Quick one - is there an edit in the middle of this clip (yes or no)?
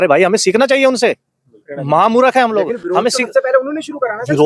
no